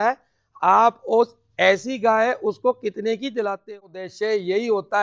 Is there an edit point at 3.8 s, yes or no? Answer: yes